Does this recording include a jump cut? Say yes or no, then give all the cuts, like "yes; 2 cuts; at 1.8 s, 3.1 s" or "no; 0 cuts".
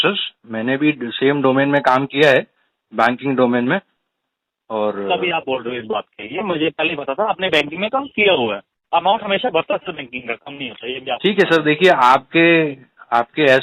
yes; 1 cut; at 8.7 s